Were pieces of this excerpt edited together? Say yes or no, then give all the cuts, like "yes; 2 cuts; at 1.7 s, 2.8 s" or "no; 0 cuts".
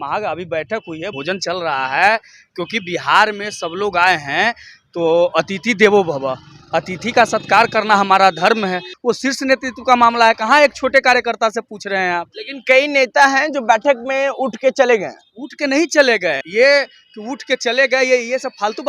yes; 3 cuts; at 1.1 s, 8.9 s, 16.4 s